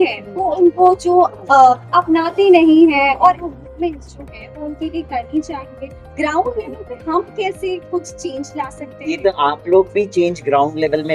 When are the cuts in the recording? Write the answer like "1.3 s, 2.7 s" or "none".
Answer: none